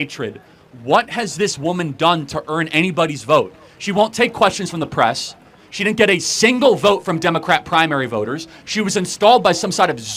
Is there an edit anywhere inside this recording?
no; 0 cuts

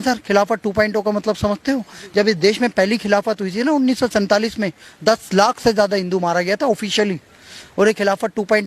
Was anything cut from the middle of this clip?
no; 0 cuts

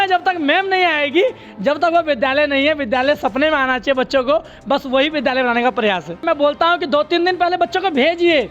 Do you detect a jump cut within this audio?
yes; 1 cut; at 6.2 s

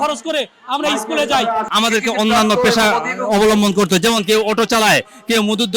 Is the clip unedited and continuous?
no; 1 cut; at 1.7 s

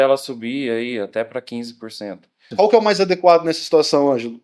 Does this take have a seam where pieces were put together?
yes; 1 cut; at 2.5 s

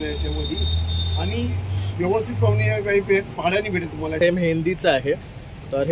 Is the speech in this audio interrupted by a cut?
yes; 1 cut; at 4.2 s

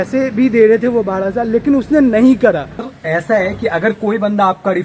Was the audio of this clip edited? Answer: no; 0 cuts

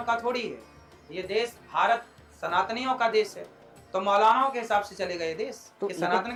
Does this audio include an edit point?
no; 0 cuts

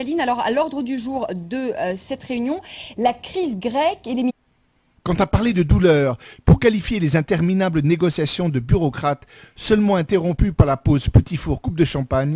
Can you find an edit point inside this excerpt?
no; 0 cuts

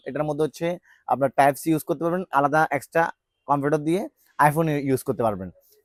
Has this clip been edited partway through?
no; 0 cuts

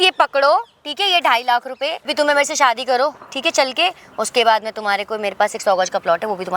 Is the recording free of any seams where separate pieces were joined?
no; 1 cut; at 2.1 s

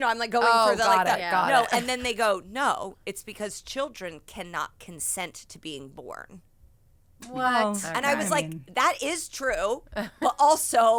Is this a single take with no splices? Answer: yes; 0 cuts

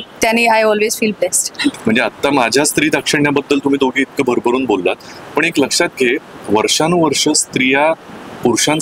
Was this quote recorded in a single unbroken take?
no; 1 cut; at 1.8 s

